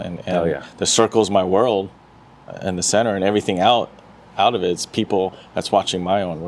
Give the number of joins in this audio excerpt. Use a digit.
0